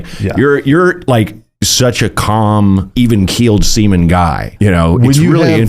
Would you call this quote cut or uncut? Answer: cut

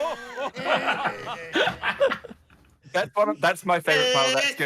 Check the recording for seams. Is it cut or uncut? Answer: cut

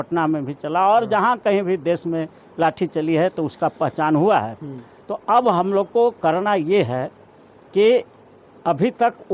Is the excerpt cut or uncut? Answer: uncut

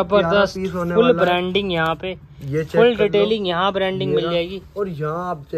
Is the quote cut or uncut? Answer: uncut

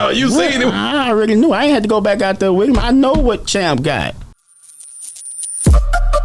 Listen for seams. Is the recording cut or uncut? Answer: cut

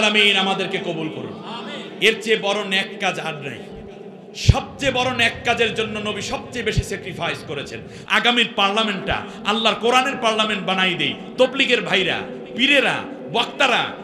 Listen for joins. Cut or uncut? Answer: cut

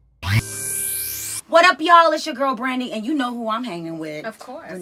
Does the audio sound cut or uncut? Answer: uncut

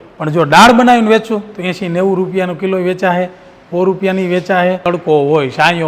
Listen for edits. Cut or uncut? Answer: cut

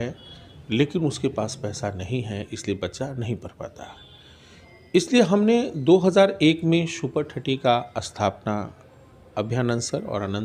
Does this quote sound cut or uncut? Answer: uncut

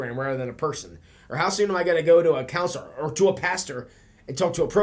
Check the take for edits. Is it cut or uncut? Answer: uncut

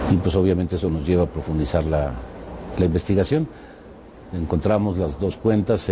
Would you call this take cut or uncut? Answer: cut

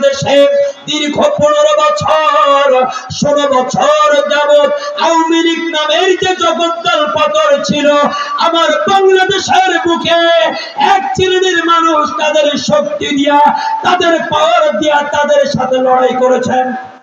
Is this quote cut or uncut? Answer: uncut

